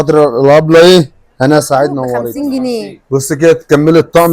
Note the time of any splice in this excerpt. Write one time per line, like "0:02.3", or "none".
0:02.3